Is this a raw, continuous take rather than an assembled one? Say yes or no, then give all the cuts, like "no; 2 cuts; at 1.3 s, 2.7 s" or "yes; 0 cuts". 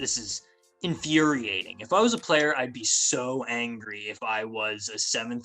yes; 0 cuts